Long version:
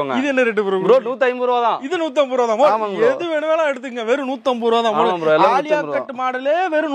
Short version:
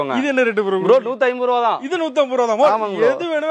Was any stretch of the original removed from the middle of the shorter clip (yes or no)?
no